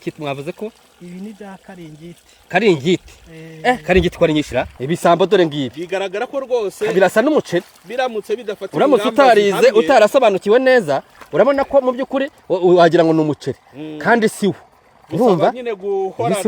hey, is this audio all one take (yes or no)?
no